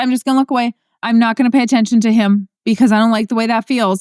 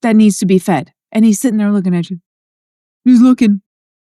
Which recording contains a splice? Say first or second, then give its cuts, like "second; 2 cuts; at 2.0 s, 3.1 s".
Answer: first; 1 cut; at 2.5 s